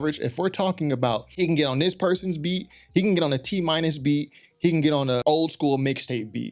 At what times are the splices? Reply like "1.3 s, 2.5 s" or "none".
1.3 s, 5.2 s

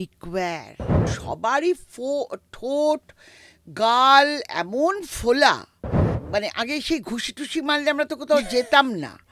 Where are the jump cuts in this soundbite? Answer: 1.1 s, 6.1 s

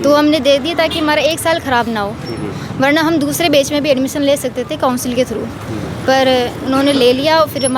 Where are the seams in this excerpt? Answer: none

